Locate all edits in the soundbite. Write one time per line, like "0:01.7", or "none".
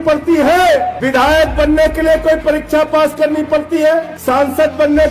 0:01.0
0:04.1